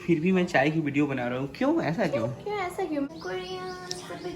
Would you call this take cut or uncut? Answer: cut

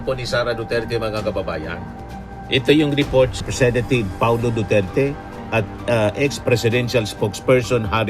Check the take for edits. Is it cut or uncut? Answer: cut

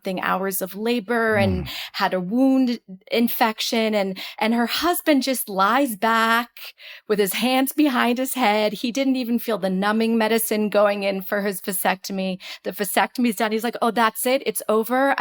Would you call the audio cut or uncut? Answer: uncut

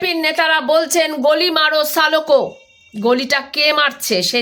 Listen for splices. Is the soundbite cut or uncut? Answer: uncut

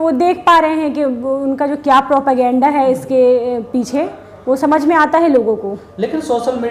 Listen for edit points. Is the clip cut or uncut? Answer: uncut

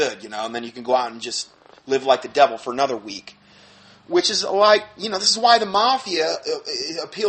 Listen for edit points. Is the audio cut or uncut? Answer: cut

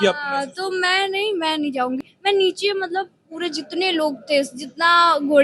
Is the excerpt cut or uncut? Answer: cut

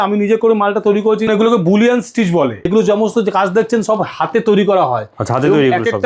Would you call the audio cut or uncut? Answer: cut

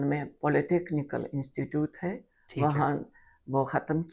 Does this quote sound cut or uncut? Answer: uncut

